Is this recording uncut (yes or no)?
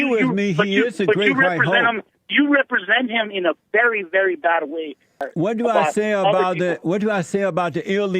no